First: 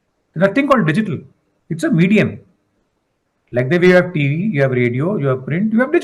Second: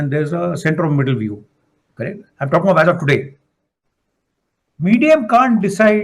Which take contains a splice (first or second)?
second